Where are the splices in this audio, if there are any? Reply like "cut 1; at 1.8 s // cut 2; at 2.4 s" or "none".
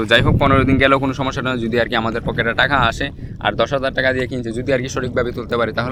none